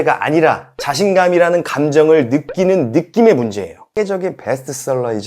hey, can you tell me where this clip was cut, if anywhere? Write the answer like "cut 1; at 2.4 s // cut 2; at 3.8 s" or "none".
cut 1; at 3.8 s